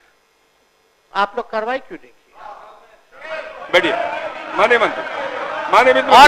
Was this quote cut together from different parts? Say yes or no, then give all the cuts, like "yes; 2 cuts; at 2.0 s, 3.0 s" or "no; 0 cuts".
no; 0 cuts